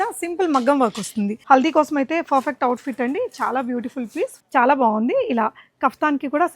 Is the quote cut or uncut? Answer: cut